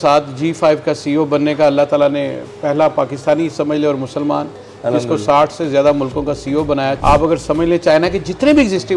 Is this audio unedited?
no; 1 cut; at 7.0 s

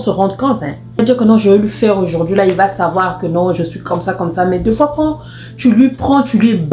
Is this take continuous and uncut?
no; 1 cut; at 1.0 s

